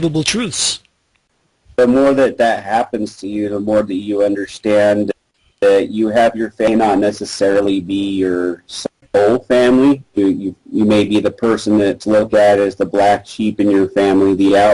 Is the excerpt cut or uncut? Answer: uncut